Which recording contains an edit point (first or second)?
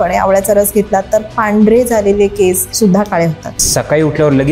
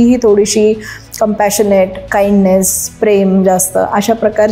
first